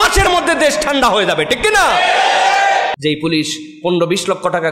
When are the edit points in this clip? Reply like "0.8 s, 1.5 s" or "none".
2.9 s